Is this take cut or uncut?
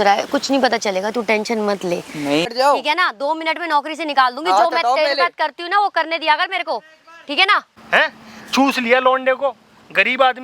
cut